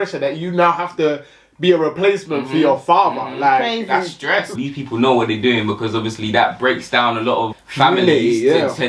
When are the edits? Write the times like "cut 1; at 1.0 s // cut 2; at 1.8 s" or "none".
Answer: cut 1; at 4.6 s